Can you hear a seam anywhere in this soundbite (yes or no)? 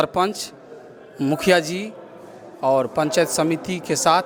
no